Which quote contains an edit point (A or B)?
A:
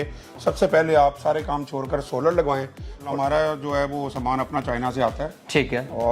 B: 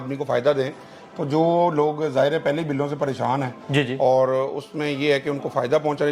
A